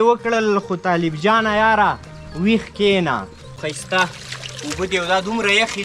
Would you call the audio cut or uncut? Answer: cut